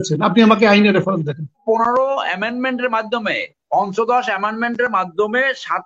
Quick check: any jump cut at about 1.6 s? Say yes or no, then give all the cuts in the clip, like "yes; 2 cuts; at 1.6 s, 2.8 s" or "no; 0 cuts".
yes; 1 cut; at 1.6 s